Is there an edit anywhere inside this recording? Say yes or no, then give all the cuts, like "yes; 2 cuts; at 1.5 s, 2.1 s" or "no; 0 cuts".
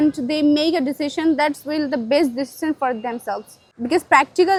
no; 0 cuts